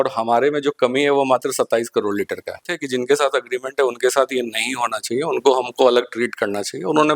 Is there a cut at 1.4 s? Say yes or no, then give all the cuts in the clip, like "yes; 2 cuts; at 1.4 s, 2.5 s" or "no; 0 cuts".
no; 1 cut; at 2.7 s